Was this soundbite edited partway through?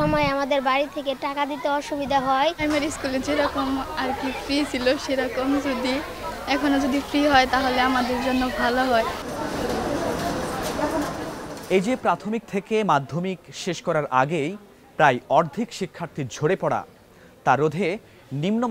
no; 0 cuts

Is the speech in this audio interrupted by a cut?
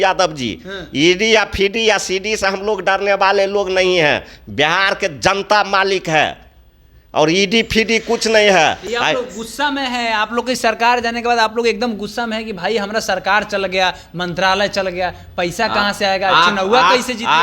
no; 0 cuts

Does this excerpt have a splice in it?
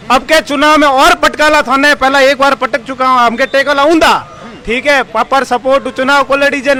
no; 0 cuts

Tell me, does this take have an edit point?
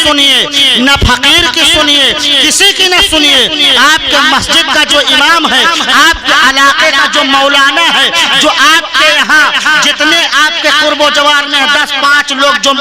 no; 0 cuts

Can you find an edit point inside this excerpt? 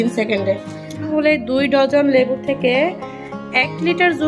yes; 1 cut; at 1.1 s

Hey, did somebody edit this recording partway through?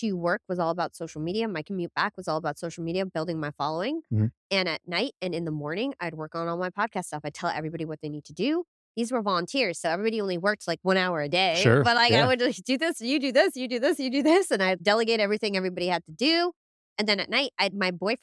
no; 0 cuts

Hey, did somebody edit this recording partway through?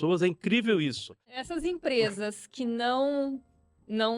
yes; 1 cut; at 1.2 s

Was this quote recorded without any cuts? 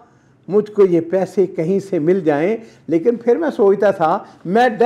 yes; 0 cuts

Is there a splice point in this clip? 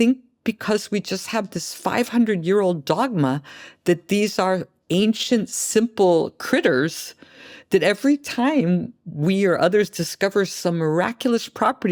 no; 0 cuts

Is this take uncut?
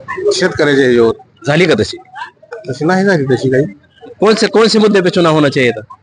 no; 1 cut; at 4.0 s

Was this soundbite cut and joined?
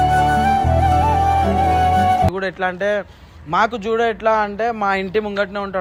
no; 0 cuts

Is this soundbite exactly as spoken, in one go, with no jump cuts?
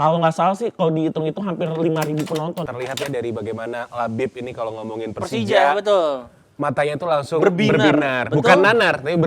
no; 1 cut; at 2.7 s

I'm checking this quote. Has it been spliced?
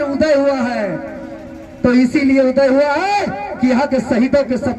no; 0 cuts

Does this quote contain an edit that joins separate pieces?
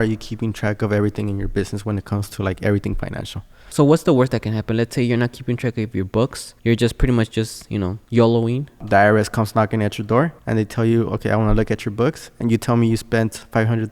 yes; 5 cuts; at 3.7 s, 6.5 s, 8.0 s, 8.8 s, 10.4 s

